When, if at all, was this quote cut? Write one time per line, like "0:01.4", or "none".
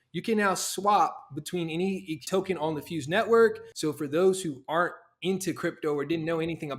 0:02.2
0:03.7